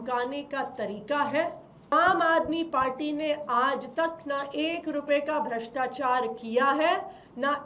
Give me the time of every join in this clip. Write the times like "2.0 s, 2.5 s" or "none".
1.9 s